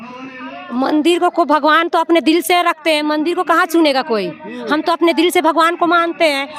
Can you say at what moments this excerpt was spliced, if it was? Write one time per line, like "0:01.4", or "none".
none